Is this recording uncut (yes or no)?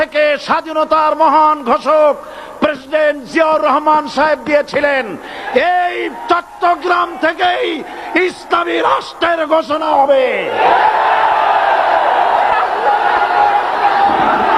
yes